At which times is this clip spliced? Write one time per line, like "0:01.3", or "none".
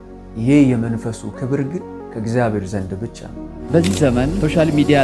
0:03.6